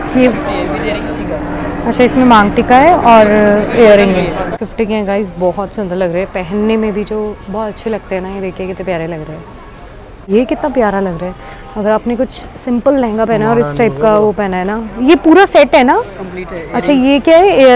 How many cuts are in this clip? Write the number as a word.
two